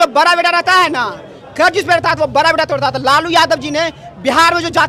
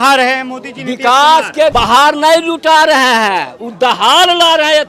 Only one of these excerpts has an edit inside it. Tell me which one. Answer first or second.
second